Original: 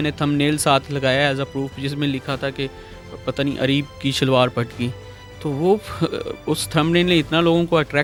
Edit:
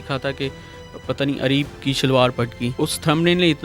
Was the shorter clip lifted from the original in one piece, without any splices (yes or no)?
no